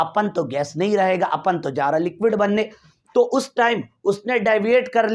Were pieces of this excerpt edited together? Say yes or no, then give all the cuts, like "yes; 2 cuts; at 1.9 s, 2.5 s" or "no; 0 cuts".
no; 0 cuts